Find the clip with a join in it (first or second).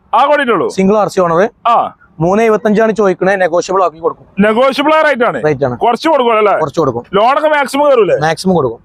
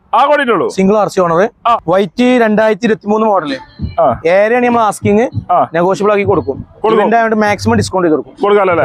second